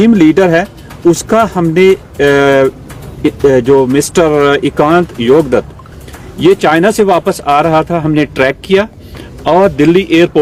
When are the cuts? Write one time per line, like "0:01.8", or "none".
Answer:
none